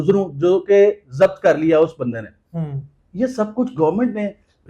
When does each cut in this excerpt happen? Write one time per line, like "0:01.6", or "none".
none